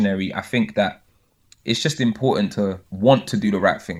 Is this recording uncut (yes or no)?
no